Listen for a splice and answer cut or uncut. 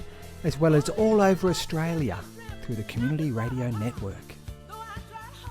cut